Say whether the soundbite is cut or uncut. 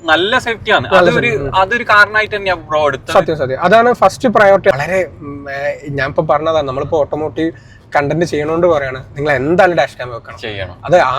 cut